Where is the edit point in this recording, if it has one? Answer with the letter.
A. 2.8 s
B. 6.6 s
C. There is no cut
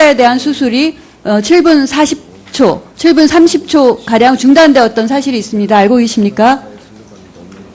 B